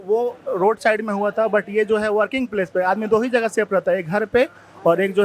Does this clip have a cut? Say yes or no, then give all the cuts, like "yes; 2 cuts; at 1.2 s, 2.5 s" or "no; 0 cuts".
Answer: no; 0 cuts